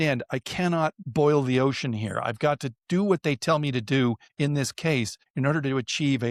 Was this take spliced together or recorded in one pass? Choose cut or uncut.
uncut